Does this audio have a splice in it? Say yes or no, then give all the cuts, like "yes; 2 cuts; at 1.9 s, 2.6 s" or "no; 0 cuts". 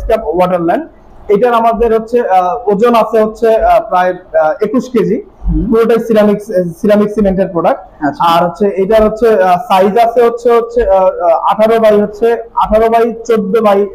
no; 0 cuts